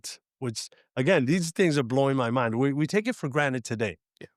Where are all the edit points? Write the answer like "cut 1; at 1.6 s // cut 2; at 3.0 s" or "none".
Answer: none